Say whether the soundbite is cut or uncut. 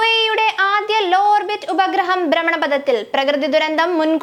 uncut